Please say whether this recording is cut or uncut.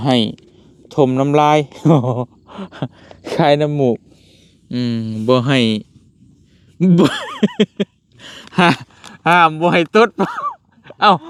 uncut